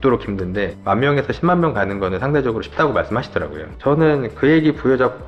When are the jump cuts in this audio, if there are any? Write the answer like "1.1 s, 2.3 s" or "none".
none